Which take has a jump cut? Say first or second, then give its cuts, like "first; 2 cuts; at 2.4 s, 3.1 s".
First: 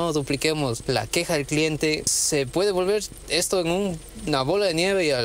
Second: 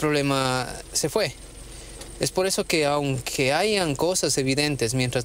first; 2 cuts; at 0.8 s, 2.1 s